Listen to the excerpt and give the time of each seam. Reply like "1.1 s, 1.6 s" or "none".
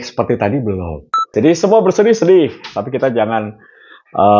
1.3 s